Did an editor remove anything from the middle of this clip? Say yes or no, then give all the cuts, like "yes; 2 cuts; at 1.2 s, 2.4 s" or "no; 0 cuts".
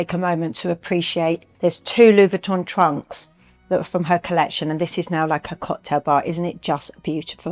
no; 0 cuts